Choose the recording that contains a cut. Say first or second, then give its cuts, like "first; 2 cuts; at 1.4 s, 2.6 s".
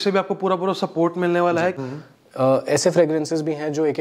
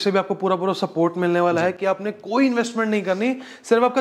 first; 1 cut; at 1.8 s